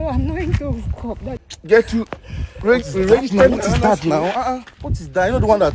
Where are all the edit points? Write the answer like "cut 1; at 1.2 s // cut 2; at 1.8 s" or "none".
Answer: cut 1; at 1.4 s